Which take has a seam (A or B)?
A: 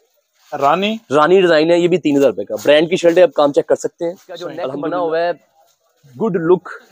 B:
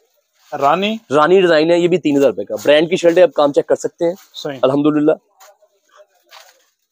A